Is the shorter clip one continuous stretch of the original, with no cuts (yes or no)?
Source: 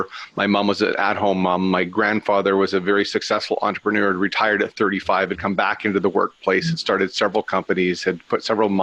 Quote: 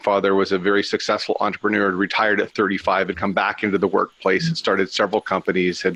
yes